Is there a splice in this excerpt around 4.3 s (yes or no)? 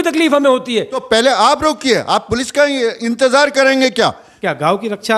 yes